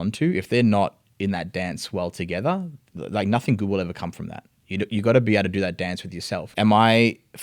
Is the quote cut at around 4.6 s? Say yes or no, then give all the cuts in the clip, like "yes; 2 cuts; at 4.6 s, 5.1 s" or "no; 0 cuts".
no; 2 cuts; at 2.9 s, 6.5 s